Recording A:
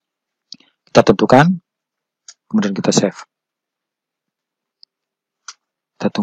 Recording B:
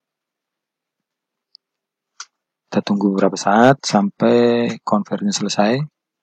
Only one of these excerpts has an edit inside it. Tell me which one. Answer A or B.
A